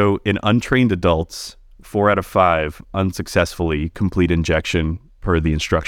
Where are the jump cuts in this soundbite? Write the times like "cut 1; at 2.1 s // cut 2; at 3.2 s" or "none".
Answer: none